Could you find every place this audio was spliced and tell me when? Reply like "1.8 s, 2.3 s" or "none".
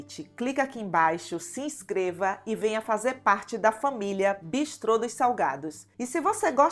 none